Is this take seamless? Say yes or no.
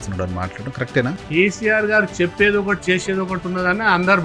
no